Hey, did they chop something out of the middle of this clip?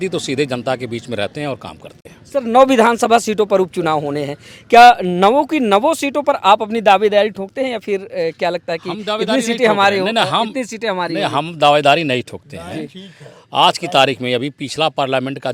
no; 0 cuts

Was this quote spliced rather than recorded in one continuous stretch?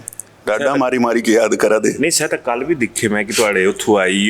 no; 0 cuts

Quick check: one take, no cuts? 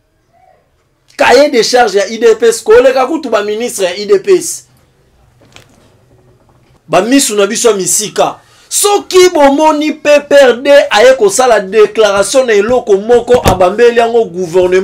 no; 1 cut; at 6.6 s

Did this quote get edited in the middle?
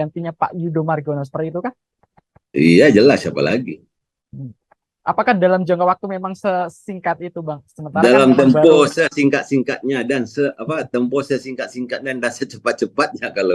no; 0 cuts

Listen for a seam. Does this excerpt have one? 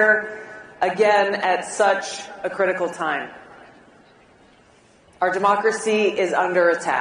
yes; 2 cuts; at 1.3 s, 6.3 s

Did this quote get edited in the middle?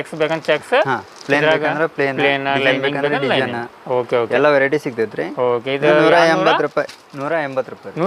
no; 0 cuts

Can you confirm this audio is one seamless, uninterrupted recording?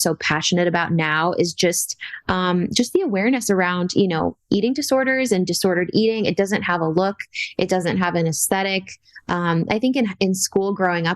yes; 0 cuts

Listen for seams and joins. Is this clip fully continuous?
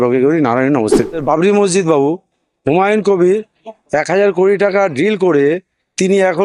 no; 1 cut; at 1.1 s

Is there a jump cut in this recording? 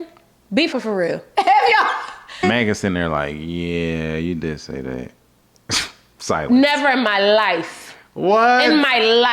yes; 2 cuts; at 0.7 s, 2.4 s

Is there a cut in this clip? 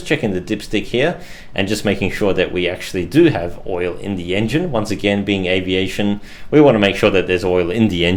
no; 0 cuts

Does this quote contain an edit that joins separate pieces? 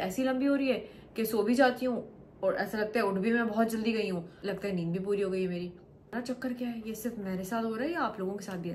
no; 0 cuts

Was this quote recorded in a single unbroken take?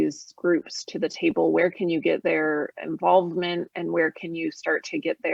yes; 0 cuts

